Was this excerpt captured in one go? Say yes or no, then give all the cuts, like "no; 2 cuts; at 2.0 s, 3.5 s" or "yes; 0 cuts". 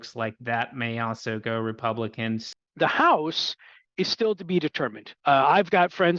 no; 1 cut; at 2.4 s